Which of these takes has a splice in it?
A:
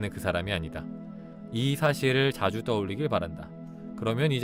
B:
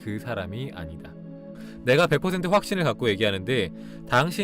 B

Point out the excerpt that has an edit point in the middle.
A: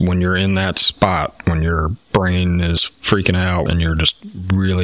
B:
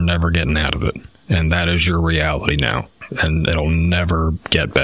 A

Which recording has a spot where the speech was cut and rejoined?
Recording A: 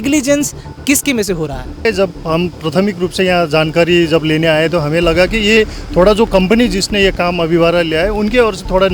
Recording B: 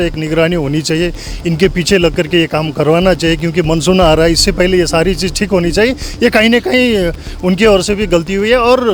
A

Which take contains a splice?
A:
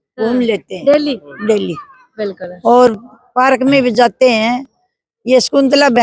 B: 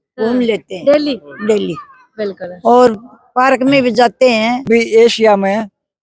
B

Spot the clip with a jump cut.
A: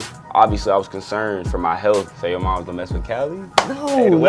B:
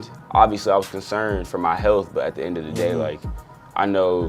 A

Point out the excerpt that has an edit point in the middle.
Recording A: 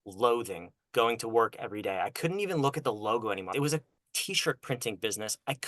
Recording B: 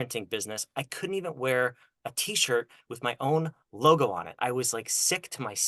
A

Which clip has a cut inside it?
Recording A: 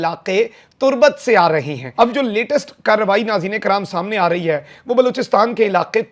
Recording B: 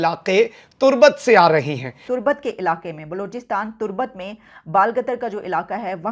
B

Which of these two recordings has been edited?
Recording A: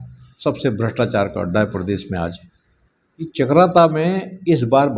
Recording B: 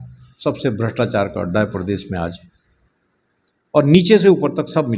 A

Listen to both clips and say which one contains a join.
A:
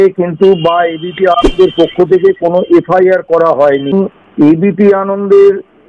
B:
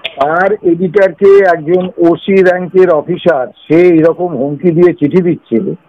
A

